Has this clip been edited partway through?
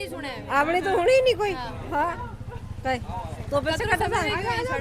no; 0 cuts

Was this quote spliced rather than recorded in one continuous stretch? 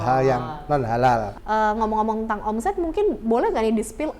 yes; 1 cut; at 1.3 s

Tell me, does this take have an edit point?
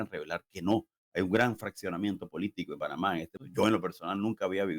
yes; 1 cut; at 2.8 s

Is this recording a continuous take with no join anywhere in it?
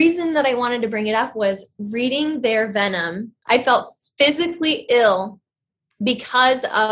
no; 1 cut; at 3.3 s

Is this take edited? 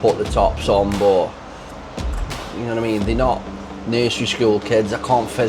no; 0 cuts

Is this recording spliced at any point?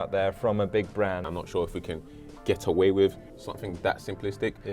yes; 1 cut; at 1.3 s

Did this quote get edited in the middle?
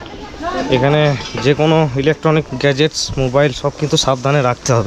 no; 0 cuts

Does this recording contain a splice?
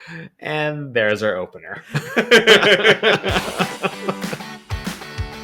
yes; 1 cut; at 4.1 s

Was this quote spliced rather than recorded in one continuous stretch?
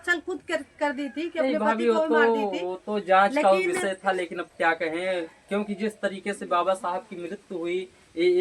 no; 0 cuts

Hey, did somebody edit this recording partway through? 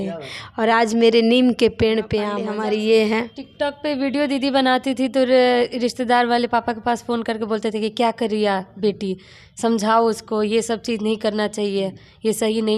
yes; 1 cut; at 2.3 s

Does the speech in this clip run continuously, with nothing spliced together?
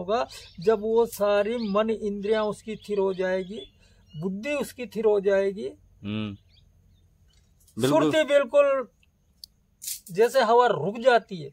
yes; 0 cuts

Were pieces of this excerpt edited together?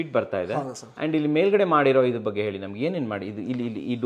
no; 0 cuts

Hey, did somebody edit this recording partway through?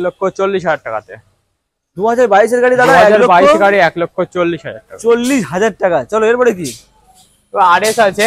no; 0 cuts

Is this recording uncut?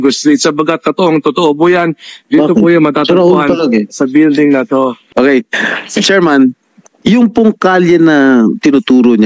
no; 2 cuts; at 5.0 s, 6.9 s

